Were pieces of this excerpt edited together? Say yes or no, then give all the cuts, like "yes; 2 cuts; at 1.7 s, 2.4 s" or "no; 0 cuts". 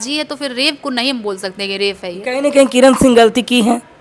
no; 0 cuts